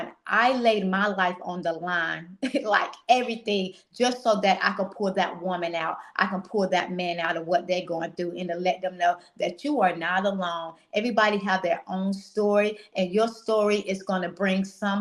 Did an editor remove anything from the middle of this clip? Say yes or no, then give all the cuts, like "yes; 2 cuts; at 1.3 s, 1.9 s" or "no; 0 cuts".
no; 0 cuts